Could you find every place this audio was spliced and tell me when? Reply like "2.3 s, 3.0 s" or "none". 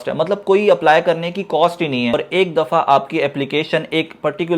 2.1 s